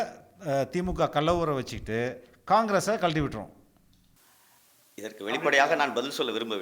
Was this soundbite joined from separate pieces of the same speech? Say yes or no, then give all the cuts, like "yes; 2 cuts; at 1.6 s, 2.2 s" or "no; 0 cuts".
no; 0 cuts